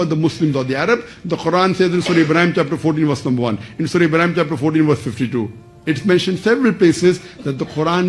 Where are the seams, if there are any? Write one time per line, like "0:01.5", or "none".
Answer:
none